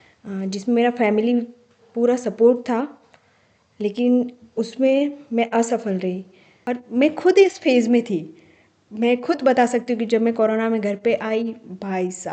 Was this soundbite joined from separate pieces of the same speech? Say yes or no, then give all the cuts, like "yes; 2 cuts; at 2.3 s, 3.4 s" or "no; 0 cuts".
yes; 1 cut; at 6.5 s